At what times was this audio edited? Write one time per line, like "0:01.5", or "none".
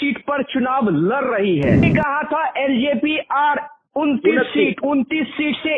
0:01.9